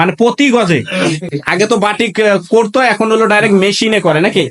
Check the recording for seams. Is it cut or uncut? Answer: cut